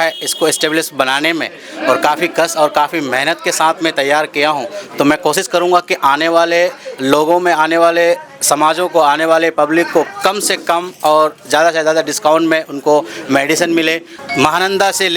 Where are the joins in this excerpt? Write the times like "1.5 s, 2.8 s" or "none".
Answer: 14.1 s